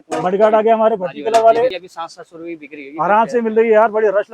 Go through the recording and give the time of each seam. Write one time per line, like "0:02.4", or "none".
0:01.9